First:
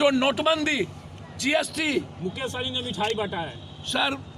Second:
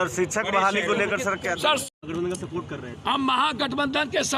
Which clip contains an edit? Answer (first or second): second